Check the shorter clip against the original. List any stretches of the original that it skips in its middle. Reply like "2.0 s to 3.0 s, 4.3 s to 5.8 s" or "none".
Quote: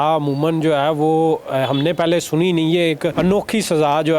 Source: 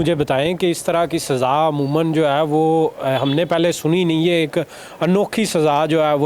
4.6 s to 5.0 s